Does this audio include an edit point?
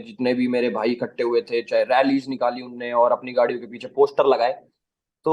no; 0 cuts

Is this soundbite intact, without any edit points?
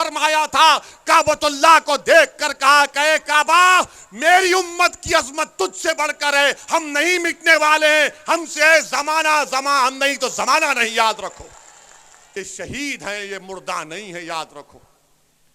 no; 1 cut; at 12.3 s

